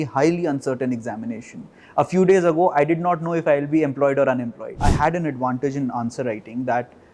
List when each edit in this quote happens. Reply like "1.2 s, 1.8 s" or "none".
4.8 s